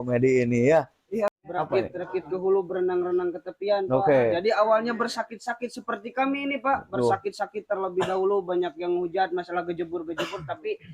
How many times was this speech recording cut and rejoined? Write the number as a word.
one